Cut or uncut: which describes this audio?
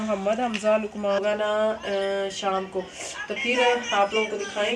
cut